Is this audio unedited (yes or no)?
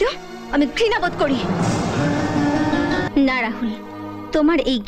no